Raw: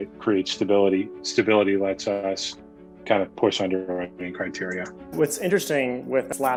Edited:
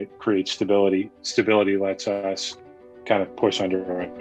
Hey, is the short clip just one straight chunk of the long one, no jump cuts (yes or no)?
yes